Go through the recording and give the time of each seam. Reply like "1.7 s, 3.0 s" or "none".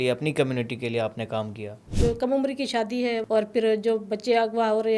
1.9 s, 3.2 s